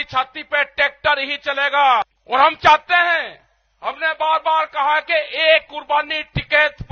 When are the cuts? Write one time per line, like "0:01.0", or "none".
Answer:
0:02.2